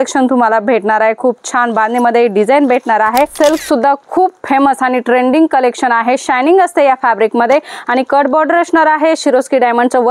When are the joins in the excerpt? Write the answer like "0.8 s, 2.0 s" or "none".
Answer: 3.3 s